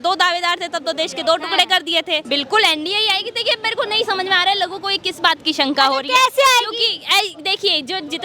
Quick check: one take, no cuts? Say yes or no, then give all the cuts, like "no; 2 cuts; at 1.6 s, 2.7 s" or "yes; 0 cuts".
no; 1 cut; at 2.2 s